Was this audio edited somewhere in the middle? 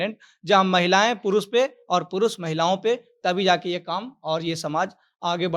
no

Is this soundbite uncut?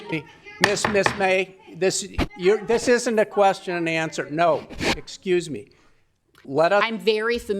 no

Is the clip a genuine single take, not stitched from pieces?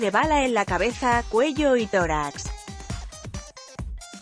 no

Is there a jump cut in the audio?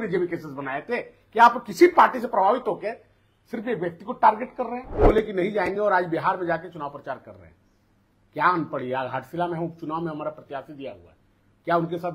yes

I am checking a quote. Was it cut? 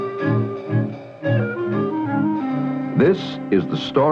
no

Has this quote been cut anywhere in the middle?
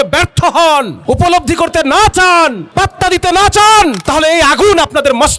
yes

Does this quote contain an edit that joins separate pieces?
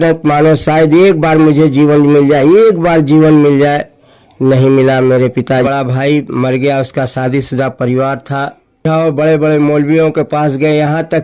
yes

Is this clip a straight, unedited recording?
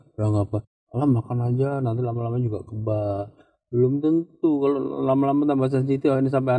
yes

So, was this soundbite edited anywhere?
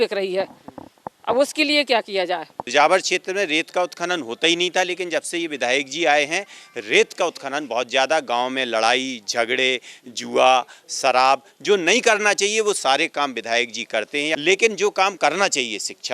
yes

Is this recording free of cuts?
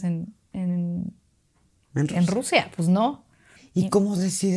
no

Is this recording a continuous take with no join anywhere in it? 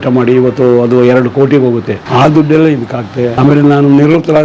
no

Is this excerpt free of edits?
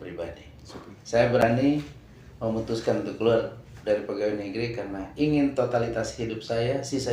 no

